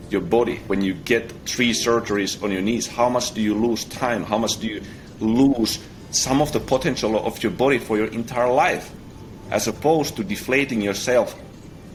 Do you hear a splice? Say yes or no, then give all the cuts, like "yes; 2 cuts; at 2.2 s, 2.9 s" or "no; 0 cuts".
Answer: no; 0 cuts